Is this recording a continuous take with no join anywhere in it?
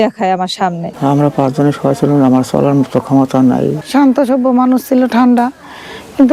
no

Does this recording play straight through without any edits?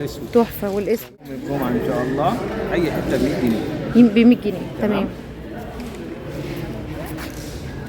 no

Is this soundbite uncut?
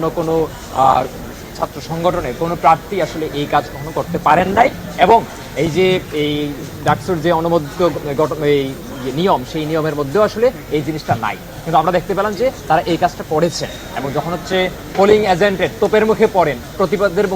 yes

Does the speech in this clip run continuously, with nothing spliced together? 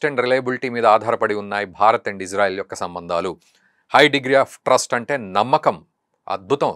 yes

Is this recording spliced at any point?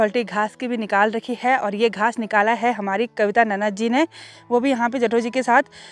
no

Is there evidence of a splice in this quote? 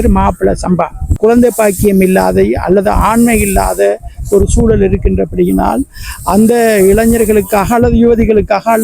yes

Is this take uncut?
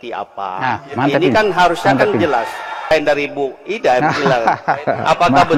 no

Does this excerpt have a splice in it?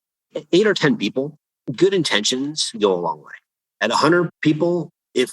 yes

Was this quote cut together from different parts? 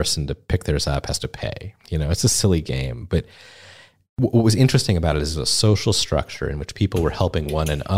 no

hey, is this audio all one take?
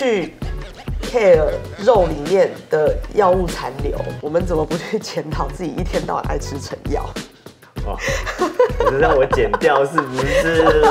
yes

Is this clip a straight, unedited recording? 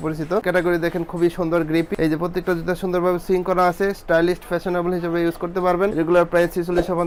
yes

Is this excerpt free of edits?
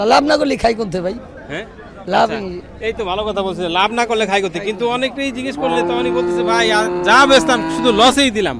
yes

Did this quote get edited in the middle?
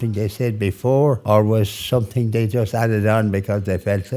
yes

